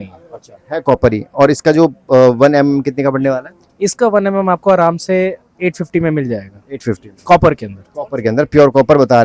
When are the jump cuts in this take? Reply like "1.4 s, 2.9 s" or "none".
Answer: none